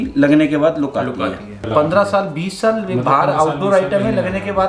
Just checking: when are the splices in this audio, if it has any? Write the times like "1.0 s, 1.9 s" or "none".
1.6 s